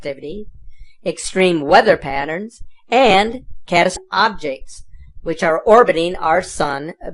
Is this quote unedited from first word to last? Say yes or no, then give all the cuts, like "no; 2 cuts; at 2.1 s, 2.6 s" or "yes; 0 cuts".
yes; 0 cuts